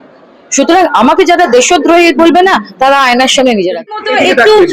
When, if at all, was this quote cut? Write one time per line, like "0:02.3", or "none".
0:03.8